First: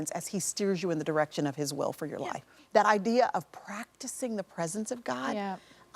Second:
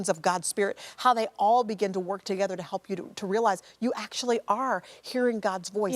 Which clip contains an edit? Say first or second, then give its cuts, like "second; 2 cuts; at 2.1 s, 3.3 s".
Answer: first; 1 cut; at 2.4 s